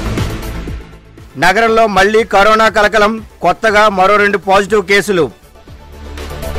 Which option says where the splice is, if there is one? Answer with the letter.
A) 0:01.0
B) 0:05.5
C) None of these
A